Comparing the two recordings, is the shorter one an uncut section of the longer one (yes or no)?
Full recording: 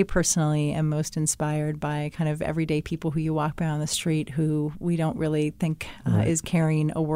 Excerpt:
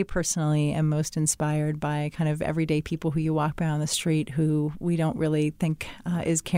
yes